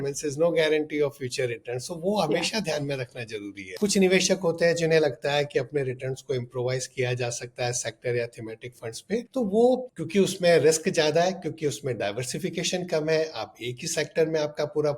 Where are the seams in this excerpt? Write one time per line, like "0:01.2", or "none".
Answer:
0:03.6

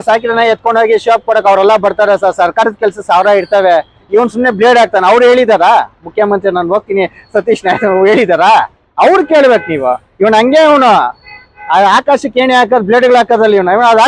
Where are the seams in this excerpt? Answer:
none

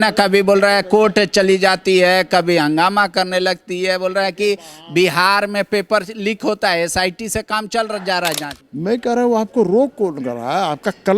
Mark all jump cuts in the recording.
0:08.5

